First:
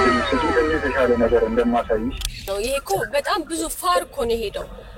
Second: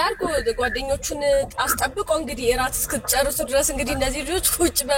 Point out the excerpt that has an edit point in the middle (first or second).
first